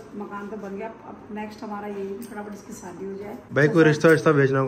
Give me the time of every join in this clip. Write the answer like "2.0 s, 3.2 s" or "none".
3.4 s